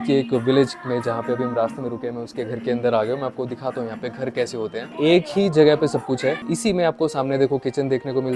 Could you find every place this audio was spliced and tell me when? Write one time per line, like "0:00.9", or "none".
0:04.9
0:06.5